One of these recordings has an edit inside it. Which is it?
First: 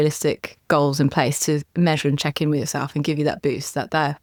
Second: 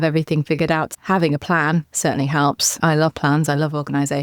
second; 2 cuts; at 1.0 s, 2.8 s

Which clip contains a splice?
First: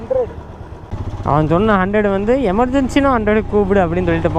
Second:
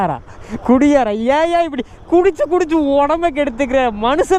first; 1 cut; at 0.9 s

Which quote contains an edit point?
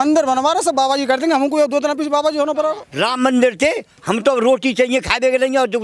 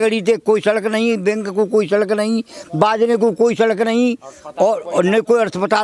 first; 1 cut; at 2.8 s

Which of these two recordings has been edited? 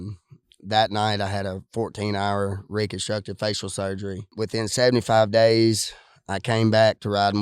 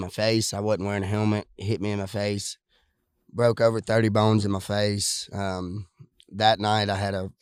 first; 1 cut; at 4.3 s

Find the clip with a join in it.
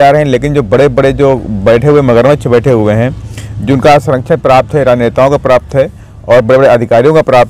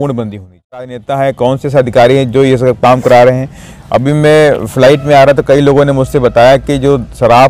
second; 1 cut; at 1.0 s

